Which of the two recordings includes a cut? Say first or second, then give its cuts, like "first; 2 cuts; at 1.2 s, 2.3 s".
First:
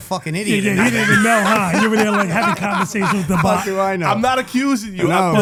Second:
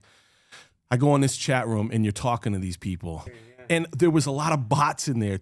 second; 1 cut; at 3.6 s